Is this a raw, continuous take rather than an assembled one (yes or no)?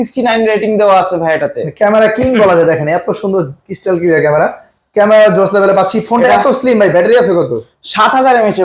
yes